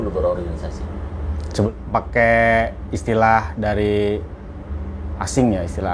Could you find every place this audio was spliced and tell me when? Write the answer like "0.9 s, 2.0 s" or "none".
1.7 s